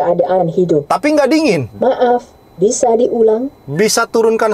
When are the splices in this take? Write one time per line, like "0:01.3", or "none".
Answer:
0:00.8
0:01.7

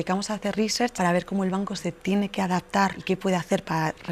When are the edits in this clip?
0:00.9
0:03.0

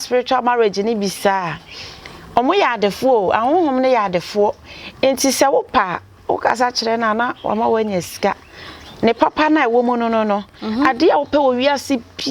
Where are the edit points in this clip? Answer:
none

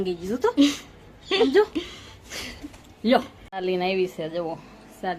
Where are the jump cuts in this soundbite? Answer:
0:03.4

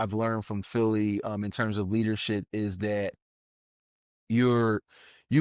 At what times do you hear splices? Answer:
none

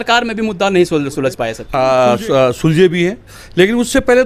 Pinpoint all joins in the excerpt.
0:01.6

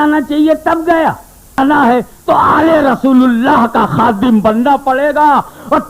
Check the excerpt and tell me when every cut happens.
0:01.6

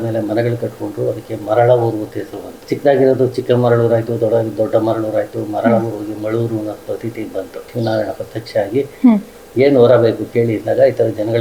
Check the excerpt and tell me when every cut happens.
0:02.5
0:07.6

